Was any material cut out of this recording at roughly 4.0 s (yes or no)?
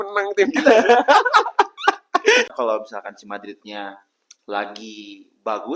no